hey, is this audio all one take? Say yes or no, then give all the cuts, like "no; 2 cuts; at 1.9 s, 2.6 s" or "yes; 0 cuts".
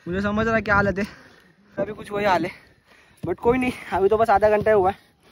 no; 1 cut; at 2.1 s